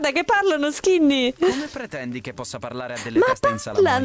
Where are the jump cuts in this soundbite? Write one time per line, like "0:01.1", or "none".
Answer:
none